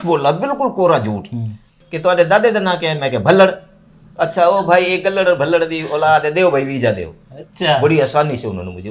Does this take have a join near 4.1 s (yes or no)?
no